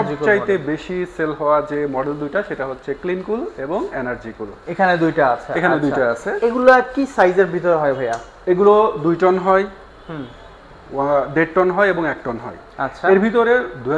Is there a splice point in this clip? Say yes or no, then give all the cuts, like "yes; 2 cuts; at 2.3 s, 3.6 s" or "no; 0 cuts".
no; 0 cuts